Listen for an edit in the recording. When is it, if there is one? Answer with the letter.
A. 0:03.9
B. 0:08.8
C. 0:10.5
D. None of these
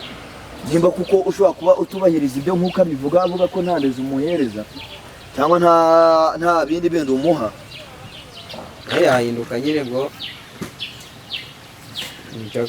B